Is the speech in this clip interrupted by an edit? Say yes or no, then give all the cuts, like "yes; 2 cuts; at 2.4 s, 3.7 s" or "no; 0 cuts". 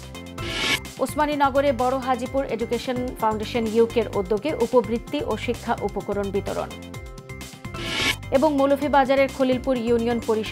no; 0 cuts